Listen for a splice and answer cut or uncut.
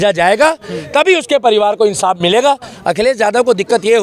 cut